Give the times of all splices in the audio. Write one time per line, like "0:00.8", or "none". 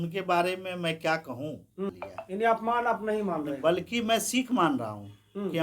0:01.9